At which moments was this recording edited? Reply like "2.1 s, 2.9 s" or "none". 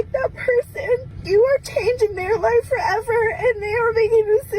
1.1 s

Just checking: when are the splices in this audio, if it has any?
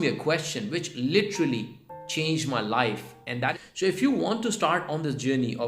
3.5 s

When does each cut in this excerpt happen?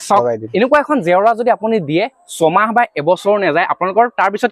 none

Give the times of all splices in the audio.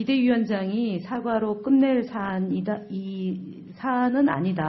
3.2 s

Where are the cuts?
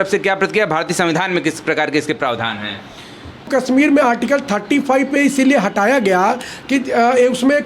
3.5 s

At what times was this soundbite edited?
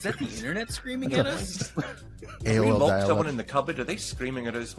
none

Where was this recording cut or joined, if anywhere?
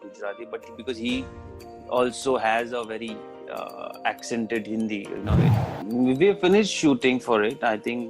5.6 s

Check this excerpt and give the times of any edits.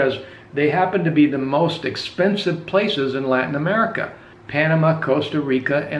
none

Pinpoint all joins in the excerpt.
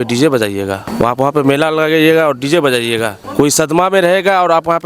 0.8 s, 3.2 s

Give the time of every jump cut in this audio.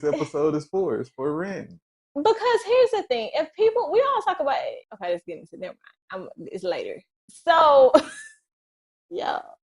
4.9 s

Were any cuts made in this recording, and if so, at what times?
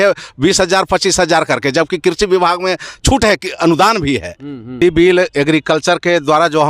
4.8 s

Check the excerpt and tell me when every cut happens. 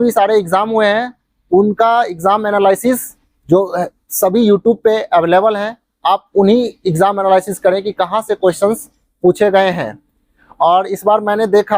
none

